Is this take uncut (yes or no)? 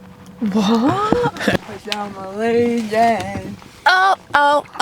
no